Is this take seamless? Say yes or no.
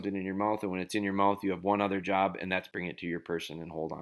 no